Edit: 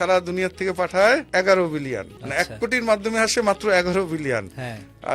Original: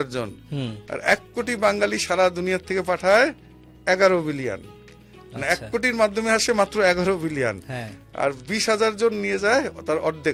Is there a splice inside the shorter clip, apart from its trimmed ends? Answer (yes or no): yes